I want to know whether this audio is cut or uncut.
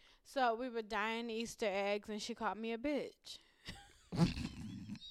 uncut